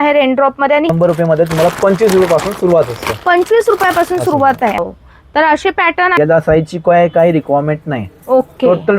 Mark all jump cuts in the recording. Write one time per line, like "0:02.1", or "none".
0:00.9
0:04.8
0:06.2